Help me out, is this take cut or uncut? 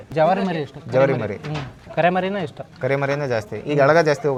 uncut